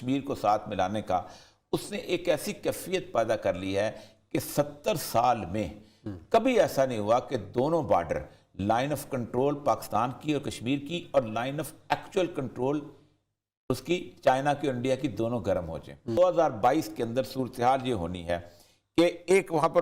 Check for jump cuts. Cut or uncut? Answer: cut